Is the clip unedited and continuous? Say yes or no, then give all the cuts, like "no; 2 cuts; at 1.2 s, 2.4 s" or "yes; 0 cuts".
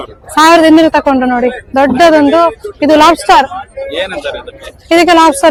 yes; 0 cuts